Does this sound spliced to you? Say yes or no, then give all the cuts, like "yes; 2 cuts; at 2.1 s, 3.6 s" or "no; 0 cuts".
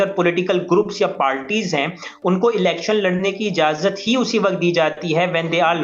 no; 0 cuts